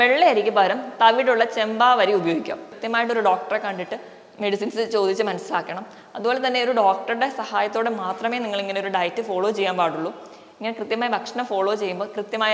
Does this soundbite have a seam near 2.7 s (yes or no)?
yes